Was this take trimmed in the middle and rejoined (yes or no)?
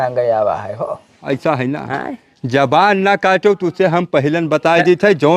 yes